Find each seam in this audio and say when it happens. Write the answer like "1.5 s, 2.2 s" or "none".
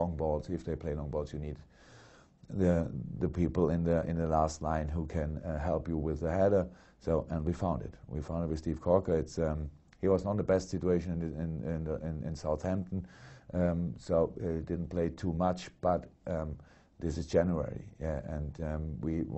6.2 s